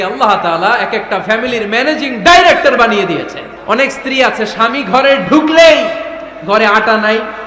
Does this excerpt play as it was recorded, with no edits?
no; 1 cut; at 3.5 s

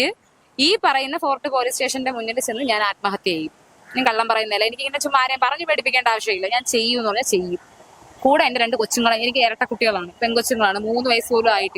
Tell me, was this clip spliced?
no; 0 cuts

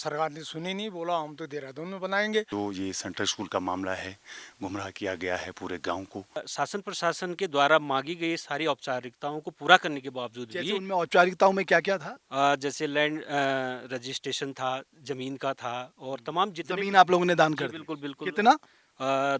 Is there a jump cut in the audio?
yes; 2 cuts; at 2.5 s, 6.5 s

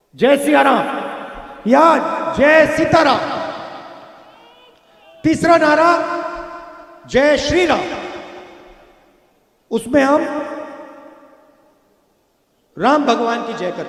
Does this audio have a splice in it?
no; 0 cuts

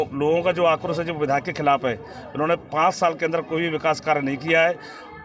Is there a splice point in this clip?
no; 0 cuts

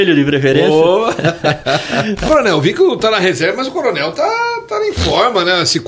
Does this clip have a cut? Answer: yes; 1 cut; at 2.2 s

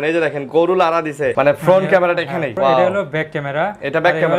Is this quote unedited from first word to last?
no; 2 cuts; at 1.3 s, 2.5 s

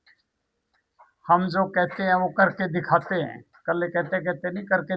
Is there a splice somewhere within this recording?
no; 0 cuts

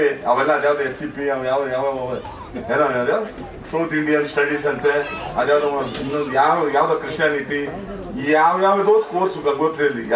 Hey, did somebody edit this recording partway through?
no; 0 cuts

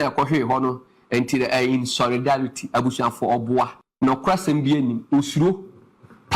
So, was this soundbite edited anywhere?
yes; 1 cut; at 3.8 s

